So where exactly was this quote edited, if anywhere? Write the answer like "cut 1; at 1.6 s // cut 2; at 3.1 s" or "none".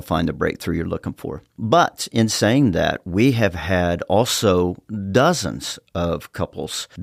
none